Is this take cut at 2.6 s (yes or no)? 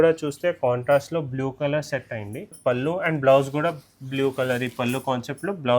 yes